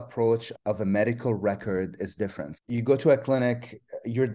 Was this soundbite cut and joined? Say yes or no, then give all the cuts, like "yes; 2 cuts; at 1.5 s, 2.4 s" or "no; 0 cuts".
yes; 1 cut; at 2.5 s